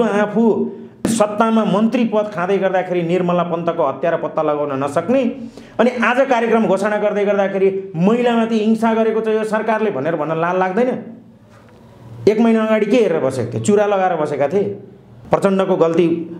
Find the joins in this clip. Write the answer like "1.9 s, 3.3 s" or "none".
1.0 s, 15.1 s